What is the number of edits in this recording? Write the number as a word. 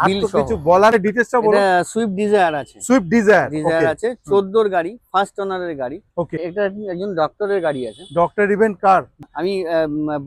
three